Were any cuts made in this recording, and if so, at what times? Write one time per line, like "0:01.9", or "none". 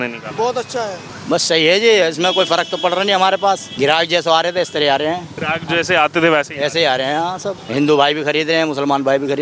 0:01.1
0:03.7
0:05.3
0:07.6

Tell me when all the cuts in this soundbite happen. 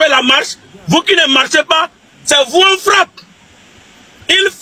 none

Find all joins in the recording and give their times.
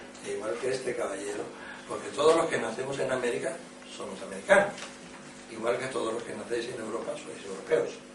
none

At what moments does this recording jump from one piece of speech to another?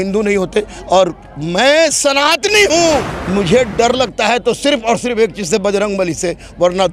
0:03.2

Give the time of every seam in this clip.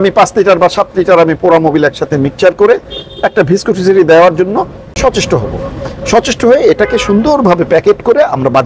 none

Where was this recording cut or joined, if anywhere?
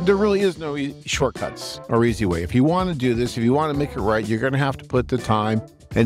none

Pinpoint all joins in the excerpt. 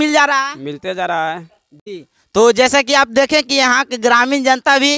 none

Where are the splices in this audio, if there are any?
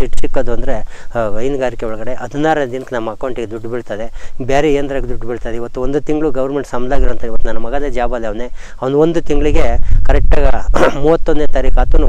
none

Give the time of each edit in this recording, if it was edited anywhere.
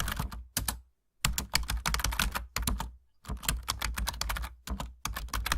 0:01.5

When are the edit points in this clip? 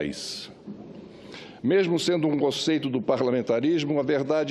0:01.1

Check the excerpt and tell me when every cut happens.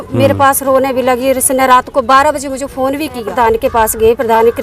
0:03.3

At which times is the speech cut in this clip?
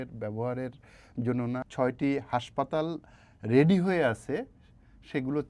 0:01.6

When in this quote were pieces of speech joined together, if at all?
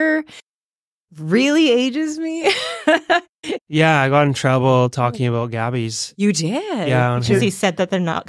0:03.6

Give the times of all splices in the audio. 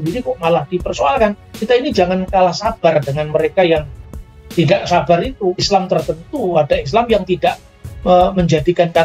0:01.5
0:05.6

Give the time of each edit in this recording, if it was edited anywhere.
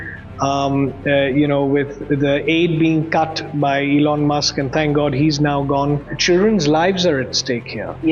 0:06.1

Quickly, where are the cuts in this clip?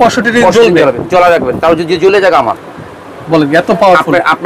none

